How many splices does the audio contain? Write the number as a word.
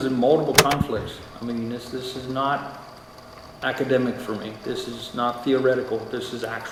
zero